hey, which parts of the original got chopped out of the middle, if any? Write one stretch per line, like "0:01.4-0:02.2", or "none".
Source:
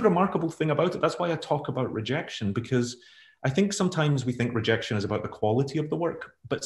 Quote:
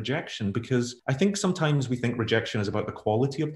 0:03.0-0:03.3